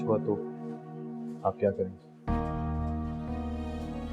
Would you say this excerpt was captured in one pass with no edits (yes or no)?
yes